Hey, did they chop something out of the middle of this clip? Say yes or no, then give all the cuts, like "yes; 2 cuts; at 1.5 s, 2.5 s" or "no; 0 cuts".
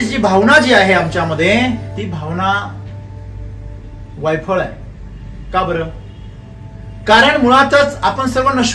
yes; 1 cut; at 1.9 s